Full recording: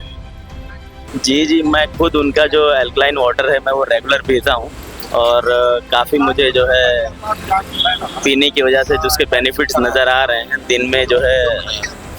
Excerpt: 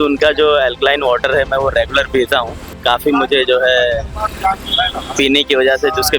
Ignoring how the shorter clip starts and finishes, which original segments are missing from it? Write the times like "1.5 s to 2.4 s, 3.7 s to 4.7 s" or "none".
4.9 s to 5.8 s